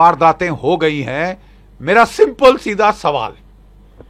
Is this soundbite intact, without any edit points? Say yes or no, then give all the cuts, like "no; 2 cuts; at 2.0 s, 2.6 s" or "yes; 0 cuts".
yes; 0 cuts